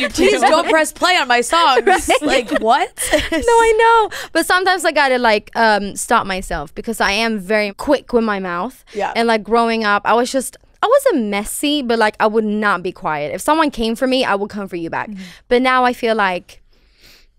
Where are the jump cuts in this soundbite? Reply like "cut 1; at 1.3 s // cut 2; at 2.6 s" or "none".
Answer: cut 1; at 7.7 s